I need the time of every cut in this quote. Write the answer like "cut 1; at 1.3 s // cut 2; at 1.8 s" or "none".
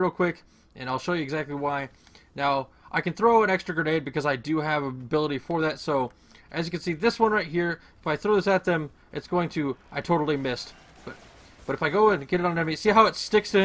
cut 1; at 12.8 s